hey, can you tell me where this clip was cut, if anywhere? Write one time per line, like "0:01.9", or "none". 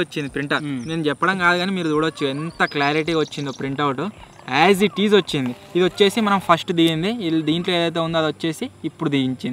none